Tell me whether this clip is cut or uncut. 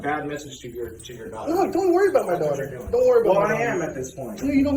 uncut